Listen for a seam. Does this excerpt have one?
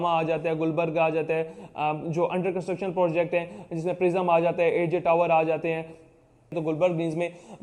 yes; 1 cut; at 6.6 s

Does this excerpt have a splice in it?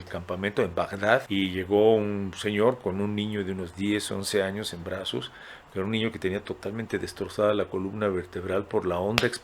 yes; 1 cut; at 1.3 s

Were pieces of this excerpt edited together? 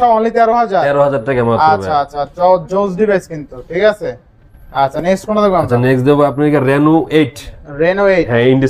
no; 0 cuts

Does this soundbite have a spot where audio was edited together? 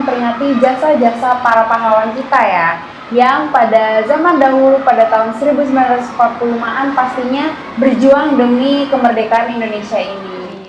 no; 0 cuts

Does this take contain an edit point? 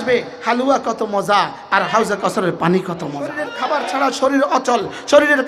yes; 1 cut; at 3.5 s

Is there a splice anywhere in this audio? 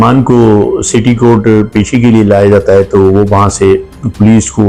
no; 0 cuts

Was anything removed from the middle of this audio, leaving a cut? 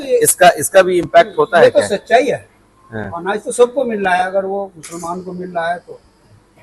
no; 0 cuts

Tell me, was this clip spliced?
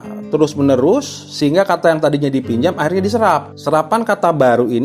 yes; 1 cut; at 3.5 s

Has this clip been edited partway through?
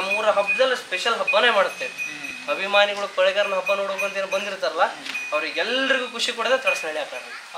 no; 0 cuts

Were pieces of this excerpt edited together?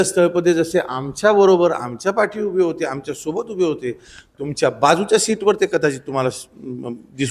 no; 0 cuts

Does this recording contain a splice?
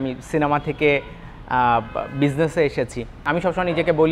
yes; 1 cut; at 3.2 s

